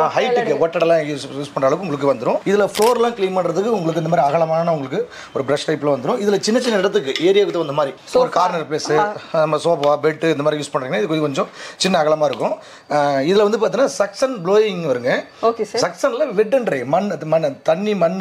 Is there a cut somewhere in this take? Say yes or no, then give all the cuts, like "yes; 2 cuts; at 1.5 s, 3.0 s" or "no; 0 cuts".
no; 0 cuts